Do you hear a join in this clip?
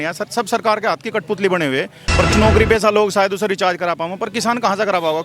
yes; 1 cut; at 2.3 s

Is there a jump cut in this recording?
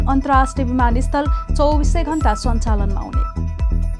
no; 0 cuts

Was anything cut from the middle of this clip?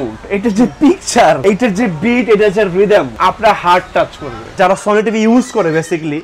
yes; 3 cuts; at 1.4 s, 3.1 s, 4.6 s

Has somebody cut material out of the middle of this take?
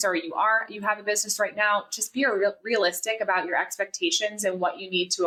no; 0 cuts

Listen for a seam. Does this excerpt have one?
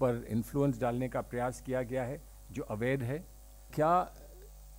yes; 1 cut; at 3.7 s

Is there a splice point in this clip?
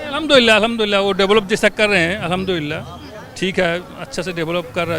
no; 0 cuts

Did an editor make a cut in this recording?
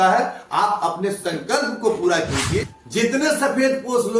yes; 1 cut; at 2.8 s

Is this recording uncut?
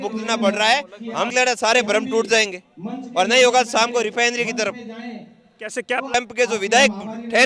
no; 2 cuts; at 1.3 s, 6.1 s

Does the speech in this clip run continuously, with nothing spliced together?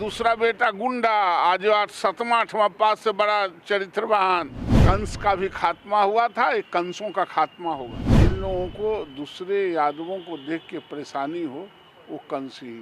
no; 2 cuts; at 4.6 s, 8.0 s

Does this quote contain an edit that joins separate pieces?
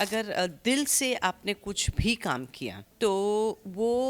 yes; 1 cut; at 2.8 s

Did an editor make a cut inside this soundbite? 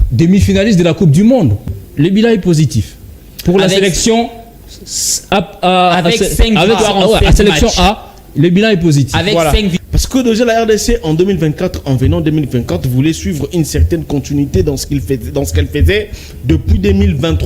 yes; 2 cuts; at 1.6 s, 9.8 s

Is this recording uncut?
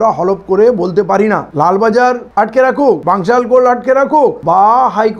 no; 3 cuts; at 1.5 s, 3.0 s, 4.4 s

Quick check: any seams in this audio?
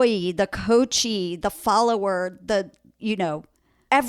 no; 0 cuts

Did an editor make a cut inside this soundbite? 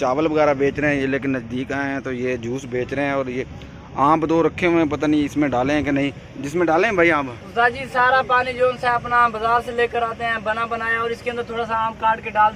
no; 0 cuts

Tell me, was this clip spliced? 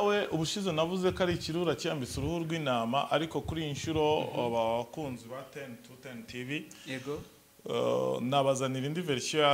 no; 0 cuts

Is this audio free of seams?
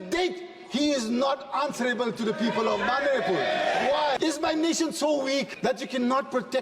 no; 2 cuts; at 4.2 s, 5.5 s

